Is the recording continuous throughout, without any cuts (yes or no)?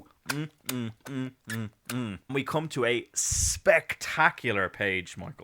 no